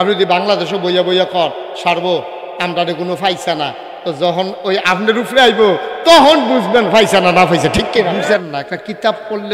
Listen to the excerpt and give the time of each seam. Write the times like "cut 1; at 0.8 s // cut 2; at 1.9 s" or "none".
cut 1; at 8.3 s